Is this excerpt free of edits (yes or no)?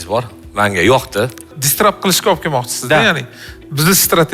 no